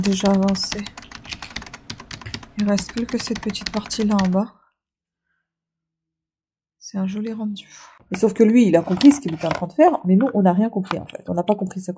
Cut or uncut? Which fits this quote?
cut